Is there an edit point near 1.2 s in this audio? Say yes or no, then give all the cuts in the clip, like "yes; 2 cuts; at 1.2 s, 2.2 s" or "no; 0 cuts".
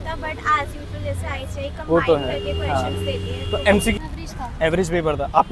no; 1 cut; at 3.9 s